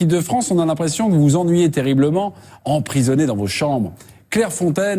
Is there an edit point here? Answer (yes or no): yes